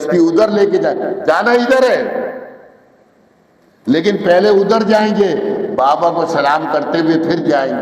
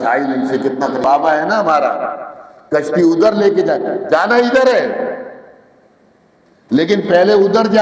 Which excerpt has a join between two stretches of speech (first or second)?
second